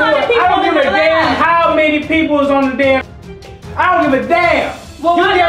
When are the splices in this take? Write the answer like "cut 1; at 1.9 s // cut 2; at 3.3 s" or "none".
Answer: none